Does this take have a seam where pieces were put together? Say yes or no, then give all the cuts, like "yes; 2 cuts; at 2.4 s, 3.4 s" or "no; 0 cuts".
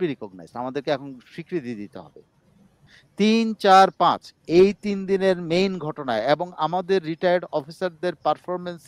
yes; 1 cut; at 2.8 s